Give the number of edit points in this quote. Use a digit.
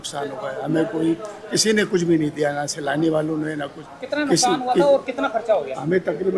0